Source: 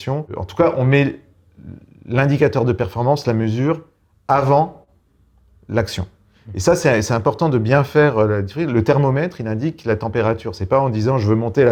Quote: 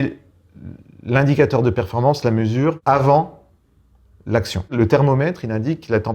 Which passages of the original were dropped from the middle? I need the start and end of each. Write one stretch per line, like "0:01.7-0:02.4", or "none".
0:03.8-0:04.2
0:06.1-0:08.7